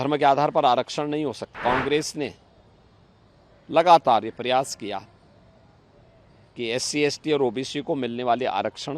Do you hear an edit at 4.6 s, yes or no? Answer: no